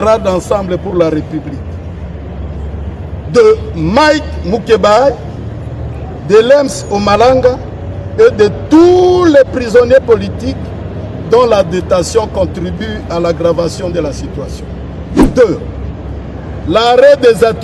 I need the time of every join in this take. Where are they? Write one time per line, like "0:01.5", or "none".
0:15.1